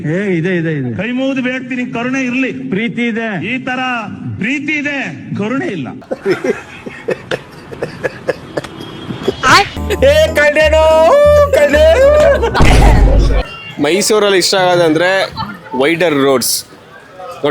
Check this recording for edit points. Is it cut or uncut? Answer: cut